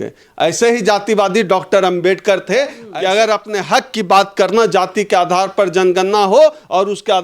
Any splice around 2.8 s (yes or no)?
yes